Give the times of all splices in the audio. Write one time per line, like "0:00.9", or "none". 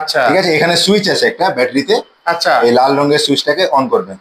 none